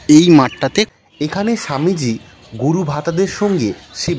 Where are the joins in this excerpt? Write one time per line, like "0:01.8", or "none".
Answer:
0:00.9